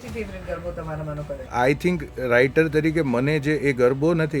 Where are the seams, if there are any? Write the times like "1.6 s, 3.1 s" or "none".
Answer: 1.5 s